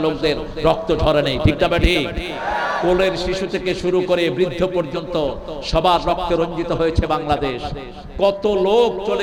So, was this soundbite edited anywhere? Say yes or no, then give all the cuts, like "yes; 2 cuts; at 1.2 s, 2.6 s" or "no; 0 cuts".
no; 0 cuts